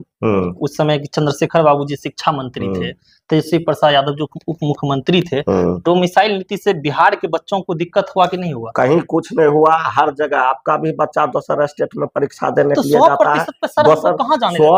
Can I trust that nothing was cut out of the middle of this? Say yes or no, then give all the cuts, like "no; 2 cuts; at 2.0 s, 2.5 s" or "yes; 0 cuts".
yes; 0 cuts